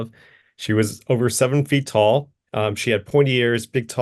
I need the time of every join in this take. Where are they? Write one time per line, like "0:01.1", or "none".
0:02.4